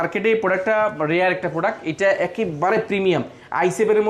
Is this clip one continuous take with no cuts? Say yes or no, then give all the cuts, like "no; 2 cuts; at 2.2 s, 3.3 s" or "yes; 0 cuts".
yes; 0 cuts